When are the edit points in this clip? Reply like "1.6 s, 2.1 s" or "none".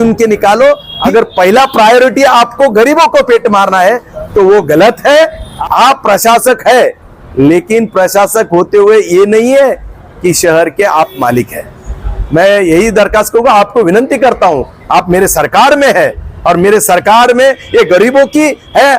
0.9 s, 5.5 s